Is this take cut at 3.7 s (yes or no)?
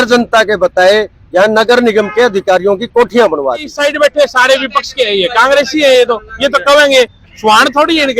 yes